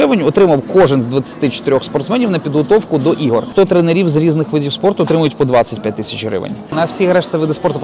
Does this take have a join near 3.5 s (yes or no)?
yes